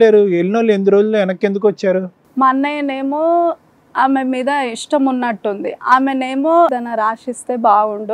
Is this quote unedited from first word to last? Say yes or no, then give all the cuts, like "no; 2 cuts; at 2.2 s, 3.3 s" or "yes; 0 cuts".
no; 1 cut; at 6.8 s